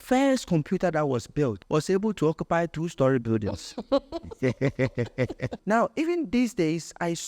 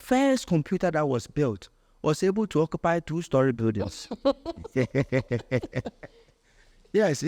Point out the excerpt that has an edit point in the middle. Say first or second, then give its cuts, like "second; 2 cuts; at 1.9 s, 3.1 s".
first; 2 cuts; at 1.6 s, 5.5 s